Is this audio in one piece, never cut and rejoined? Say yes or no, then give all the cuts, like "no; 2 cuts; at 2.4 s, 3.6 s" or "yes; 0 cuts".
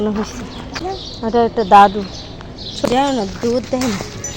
no; 2 cuts; at 0.8 s, 2.8 s